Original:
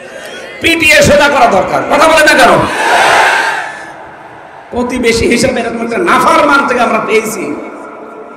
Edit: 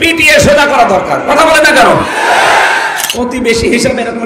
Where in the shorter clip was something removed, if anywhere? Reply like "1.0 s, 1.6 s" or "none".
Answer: 3.0 s